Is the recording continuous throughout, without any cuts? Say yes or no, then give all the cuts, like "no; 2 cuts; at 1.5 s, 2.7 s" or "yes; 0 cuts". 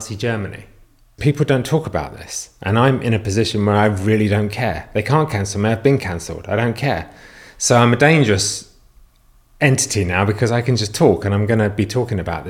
no; 1 cut; at 1.2 s